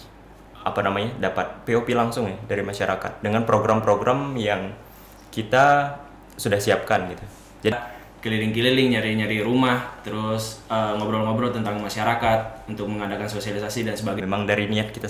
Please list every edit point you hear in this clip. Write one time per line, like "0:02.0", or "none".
0:07.7
0:14.2